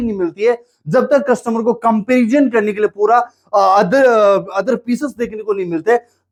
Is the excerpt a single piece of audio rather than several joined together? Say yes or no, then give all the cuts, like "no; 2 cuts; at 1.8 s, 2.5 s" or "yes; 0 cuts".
yes; 0 cuts